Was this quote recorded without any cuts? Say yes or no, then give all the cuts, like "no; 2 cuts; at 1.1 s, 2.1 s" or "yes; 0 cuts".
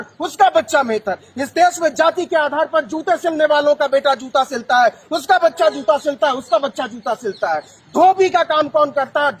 yes; 0 cuts